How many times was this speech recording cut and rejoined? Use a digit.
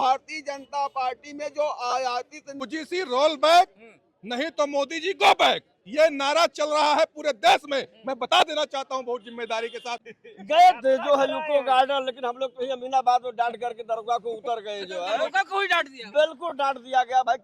2